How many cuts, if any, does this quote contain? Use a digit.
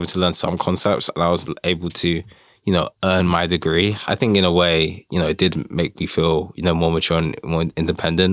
1